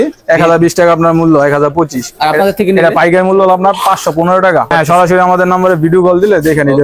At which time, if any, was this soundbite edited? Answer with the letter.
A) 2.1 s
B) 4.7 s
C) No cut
B